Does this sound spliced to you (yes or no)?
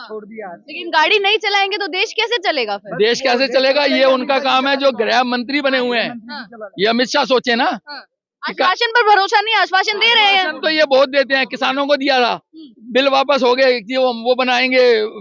no